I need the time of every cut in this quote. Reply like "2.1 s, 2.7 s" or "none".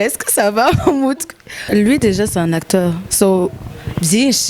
1.7 s